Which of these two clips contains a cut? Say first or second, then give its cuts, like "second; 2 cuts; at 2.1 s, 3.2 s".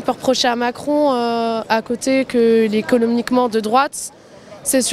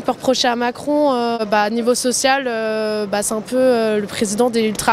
second; 1 cut; at 1.4 s